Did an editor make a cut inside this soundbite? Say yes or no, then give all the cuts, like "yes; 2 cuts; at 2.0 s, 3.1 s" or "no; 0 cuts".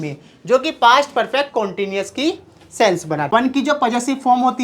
yes; 1 cut; at 3.2 s